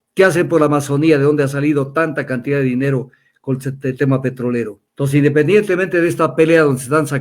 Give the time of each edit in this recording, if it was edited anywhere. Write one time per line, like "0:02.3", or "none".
0:04.8